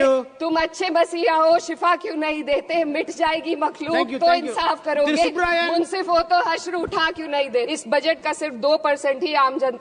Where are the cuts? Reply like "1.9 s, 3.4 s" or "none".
7.7 s